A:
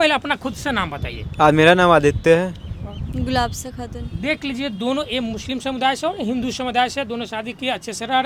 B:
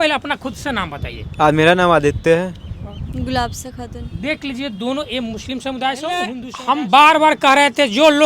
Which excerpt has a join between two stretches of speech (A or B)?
B